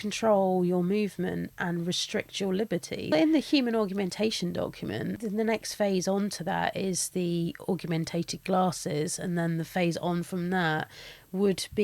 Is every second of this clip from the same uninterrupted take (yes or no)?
no